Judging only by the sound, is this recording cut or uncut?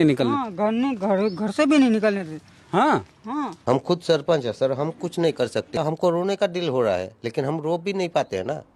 cut